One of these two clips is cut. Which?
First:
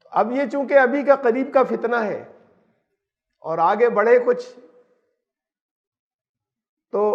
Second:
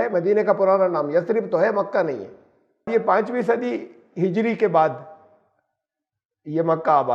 second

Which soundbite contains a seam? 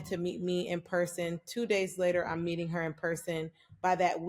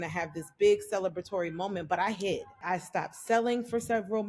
second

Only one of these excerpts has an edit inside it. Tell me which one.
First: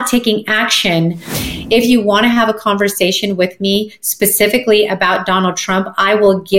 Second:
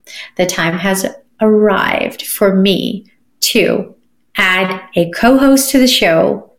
first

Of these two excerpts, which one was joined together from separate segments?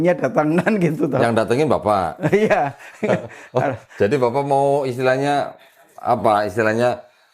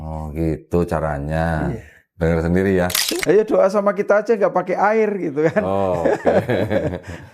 second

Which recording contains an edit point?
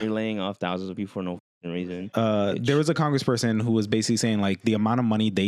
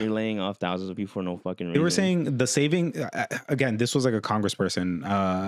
first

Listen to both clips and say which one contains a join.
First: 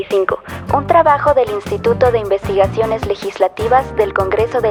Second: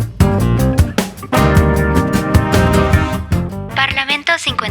second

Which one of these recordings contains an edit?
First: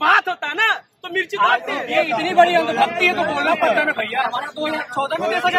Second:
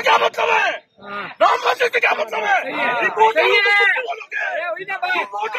first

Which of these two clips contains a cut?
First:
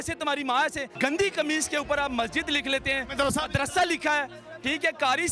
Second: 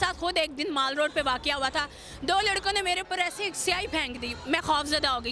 first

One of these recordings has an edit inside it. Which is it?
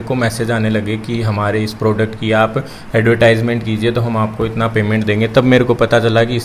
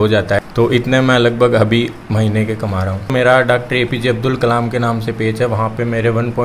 second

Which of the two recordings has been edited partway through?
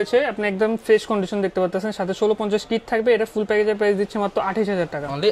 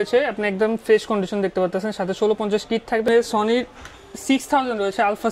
second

